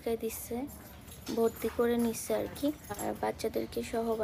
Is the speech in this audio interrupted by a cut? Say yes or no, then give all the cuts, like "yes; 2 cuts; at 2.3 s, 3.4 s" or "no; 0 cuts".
yes; 2 cuts; at 1.1 s, 3.0 s